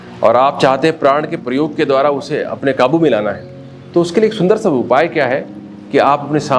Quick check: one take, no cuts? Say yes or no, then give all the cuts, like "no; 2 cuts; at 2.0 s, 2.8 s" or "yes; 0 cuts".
yes; 0 cuts